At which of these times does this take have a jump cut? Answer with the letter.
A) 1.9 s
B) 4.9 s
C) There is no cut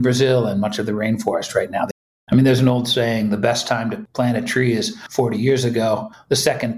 A